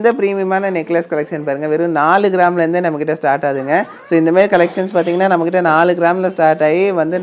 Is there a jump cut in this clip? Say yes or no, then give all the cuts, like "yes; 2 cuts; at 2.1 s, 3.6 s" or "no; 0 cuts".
no; 0 cuts